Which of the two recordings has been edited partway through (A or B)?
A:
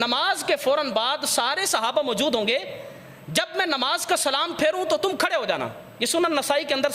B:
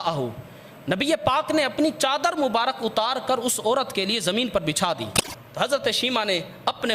B